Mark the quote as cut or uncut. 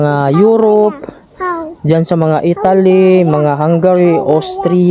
uncut